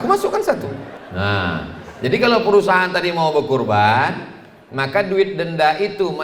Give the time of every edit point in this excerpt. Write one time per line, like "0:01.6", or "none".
0:01.0

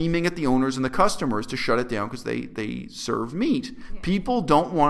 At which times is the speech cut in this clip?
0:03.9

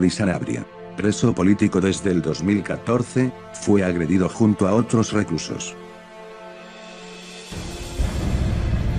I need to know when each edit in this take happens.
0:04.1

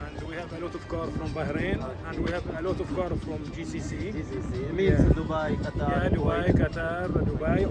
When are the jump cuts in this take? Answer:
none

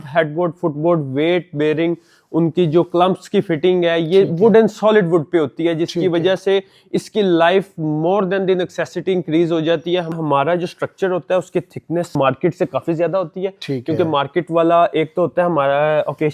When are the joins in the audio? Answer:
0:10.1
0:12.2

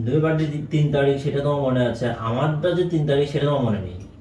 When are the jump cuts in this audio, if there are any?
none

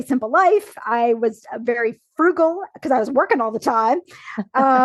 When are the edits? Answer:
none

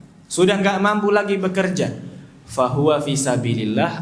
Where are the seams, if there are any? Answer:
none

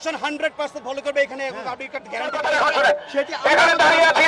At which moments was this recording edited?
0:02.4

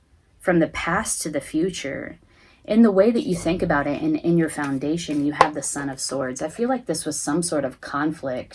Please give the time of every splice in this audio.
none

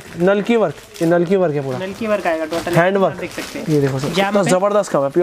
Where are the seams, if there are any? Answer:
none

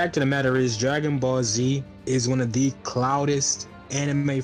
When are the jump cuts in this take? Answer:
none

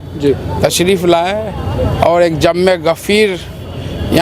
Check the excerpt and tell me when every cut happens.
none

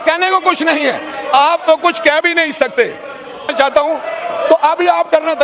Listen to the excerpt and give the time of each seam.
0:03.5

